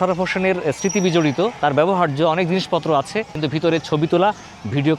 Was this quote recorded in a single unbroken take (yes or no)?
no